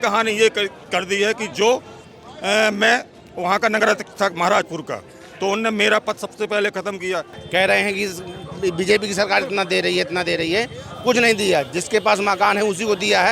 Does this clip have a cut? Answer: yes; 1 cut; at 7.3 s

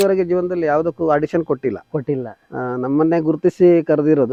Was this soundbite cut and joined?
no; 0 cuts

